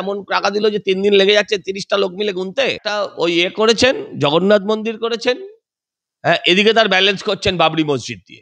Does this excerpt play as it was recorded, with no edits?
no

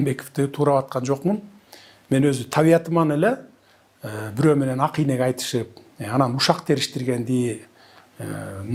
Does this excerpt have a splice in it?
no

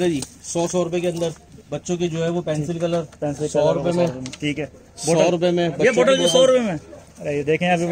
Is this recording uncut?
yes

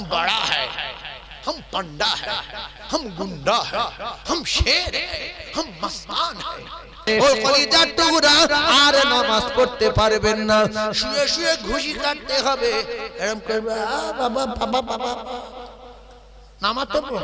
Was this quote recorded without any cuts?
no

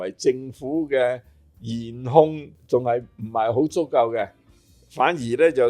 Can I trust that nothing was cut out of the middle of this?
no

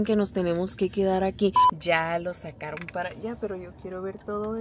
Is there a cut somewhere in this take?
yes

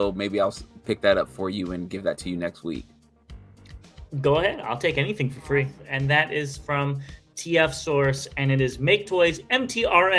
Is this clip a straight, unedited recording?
no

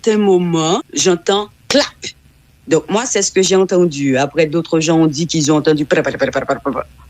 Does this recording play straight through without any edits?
no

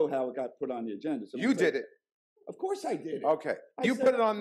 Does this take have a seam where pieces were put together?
no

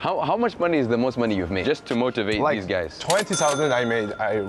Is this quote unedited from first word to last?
no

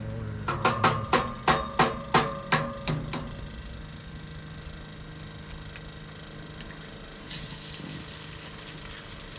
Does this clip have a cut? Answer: no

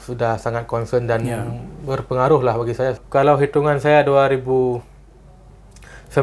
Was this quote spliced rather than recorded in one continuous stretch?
yes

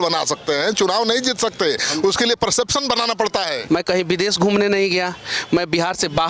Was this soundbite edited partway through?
yes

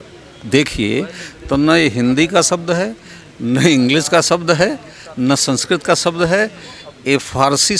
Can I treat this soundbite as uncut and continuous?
yes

